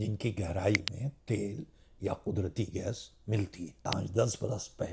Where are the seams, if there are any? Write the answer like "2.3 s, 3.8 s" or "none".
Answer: 4.0 s